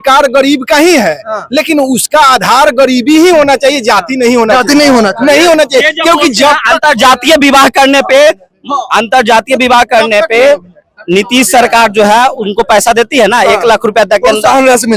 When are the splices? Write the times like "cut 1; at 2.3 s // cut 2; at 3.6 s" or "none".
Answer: none